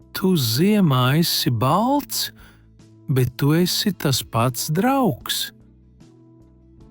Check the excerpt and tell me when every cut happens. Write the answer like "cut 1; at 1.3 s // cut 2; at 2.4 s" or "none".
cut 1; at 5.7 s